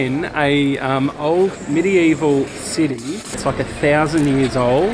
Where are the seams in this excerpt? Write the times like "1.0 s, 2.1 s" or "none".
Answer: none

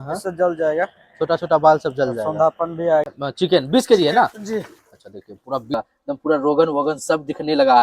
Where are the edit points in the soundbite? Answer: 3.1 s, 5.7 s

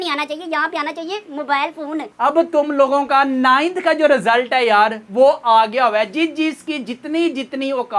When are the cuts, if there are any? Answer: 2.1 s

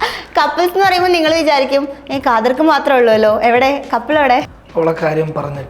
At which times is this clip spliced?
4.6 s

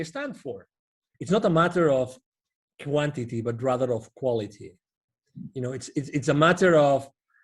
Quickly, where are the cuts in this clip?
1.0 s

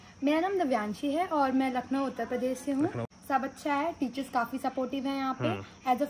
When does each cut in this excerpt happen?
3.0 s

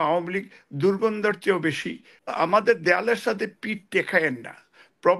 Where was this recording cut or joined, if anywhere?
2.1 s

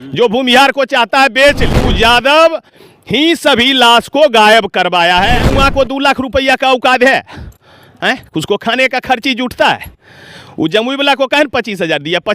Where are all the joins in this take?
1.8 s, 5.4 s

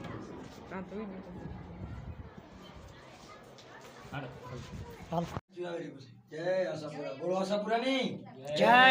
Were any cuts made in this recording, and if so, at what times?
5.5 s

